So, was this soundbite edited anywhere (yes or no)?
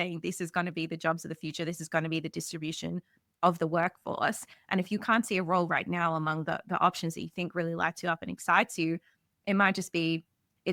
no